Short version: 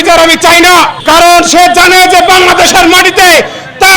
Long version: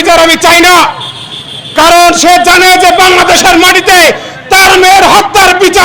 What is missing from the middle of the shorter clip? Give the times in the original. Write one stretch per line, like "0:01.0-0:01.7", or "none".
0:01.0-0:01.7